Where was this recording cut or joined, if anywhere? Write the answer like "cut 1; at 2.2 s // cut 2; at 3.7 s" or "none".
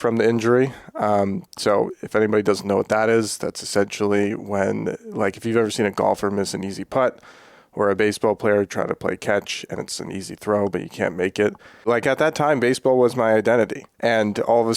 cut 1; at 11.9 s // cut 2; at 13.9 s